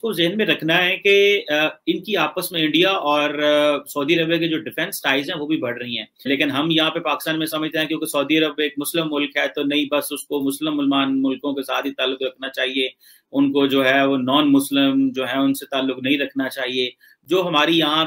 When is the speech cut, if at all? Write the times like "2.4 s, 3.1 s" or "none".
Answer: none